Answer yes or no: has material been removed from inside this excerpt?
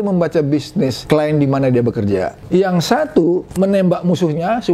yes